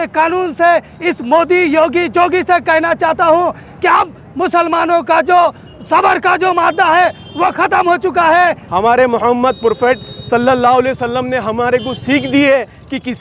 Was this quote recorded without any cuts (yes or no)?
no